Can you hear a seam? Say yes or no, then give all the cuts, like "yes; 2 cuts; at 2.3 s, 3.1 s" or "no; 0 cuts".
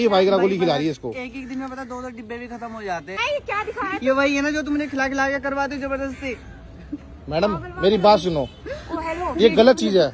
yes; 1 cut; at 3.2 s